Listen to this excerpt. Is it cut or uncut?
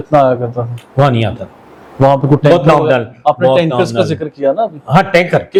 uncut